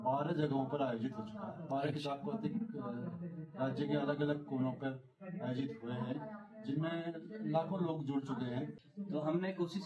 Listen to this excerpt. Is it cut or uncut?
cut